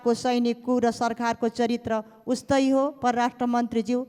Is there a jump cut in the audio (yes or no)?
no